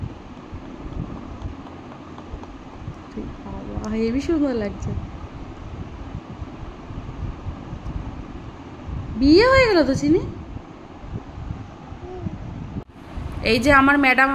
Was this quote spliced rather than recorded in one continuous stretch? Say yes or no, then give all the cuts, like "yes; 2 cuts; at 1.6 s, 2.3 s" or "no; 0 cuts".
yes; 1 cut; at 12.9 s